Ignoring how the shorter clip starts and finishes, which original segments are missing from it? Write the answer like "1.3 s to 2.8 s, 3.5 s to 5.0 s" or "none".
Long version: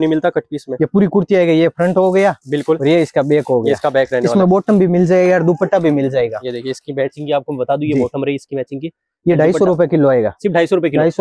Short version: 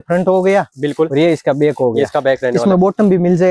none

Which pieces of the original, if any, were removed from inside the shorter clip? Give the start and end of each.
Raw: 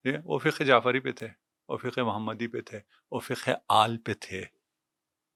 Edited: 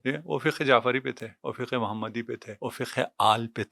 1.3 s to 1.5 s, 2.7 s to 3.0 s

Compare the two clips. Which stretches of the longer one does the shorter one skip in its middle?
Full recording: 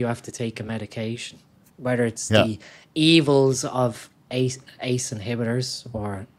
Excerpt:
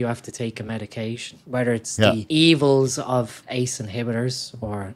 1.3 s to 1.6 s, 2.5 s to 2.9 s, 4.1 s to 4.7 s

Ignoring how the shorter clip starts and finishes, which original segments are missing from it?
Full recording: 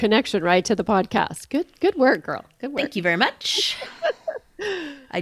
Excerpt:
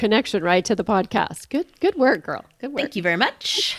none

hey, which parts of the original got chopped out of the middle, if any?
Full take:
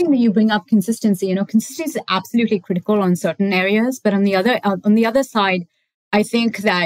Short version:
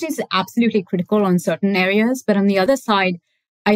4.4 s to 5.1 s

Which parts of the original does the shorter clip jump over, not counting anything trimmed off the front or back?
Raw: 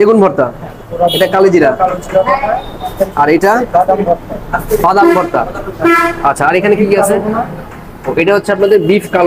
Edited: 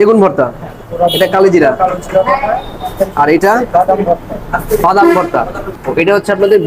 5.6 s to 7.8 s

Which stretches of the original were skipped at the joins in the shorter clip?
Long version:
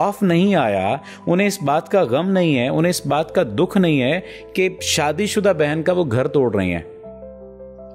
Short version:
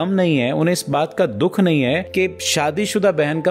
4.2 s to 4.5 s

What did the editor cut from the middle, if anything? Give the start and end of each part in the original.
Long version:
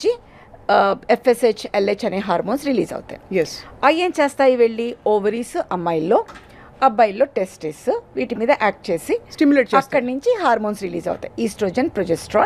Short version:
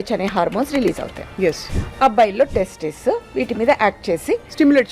3.6 s to 6.5 s

